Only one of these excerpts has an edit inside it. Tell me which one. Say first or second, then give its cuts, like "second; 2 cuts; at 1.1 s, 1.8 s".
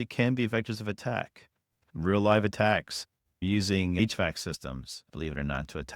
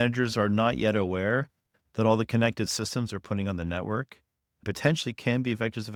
first; 2 cuts; at 1.8 s, 5.0 s